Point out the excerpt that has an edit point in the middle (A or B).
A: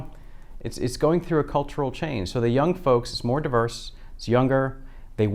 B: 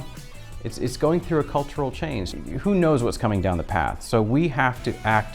B